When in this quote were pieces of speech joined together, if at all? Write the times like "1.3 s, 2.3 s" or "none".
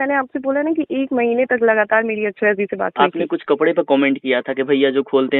3.0 s